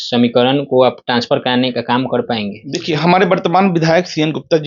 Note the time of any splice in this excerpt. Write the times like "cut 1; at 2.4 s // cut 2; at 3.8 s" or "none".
cut 1; at 2.7 s